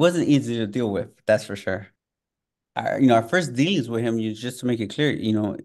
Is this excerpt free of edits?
no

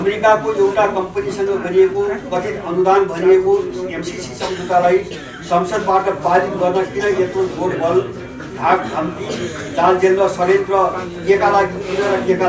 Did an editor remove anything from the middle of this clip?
no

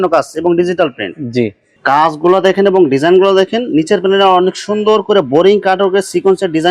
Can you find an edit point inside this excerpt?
yes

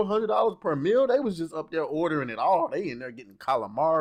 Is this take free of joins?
yes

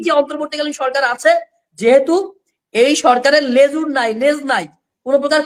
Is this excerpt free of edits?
yes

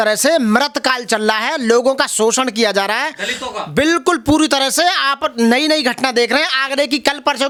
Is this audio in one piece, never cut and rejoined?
yes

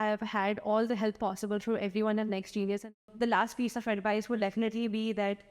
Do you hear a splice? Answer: yes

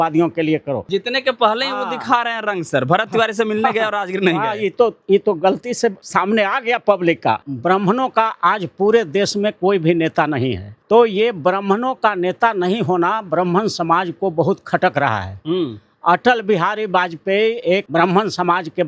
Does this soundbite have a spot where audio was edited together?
yes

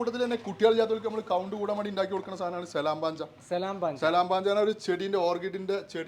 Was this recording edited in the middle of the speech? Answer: no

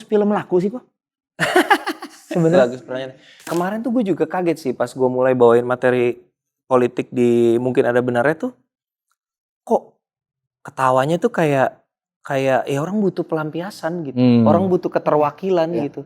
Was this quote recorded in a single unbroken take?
no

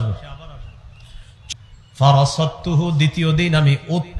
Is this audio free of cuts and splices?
no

